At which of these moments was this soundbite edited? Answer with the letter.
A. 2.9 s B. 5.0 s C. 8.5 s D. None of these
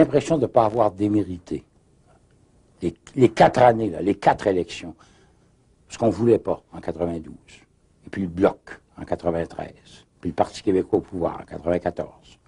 D